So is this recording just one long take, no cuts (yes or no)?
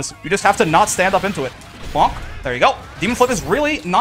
no